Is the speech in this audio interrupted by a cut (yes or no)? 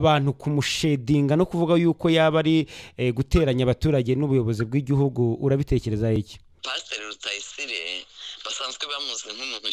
yes